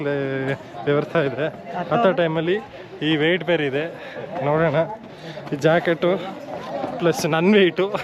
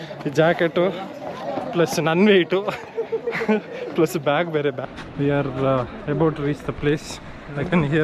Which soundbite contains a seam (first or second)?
second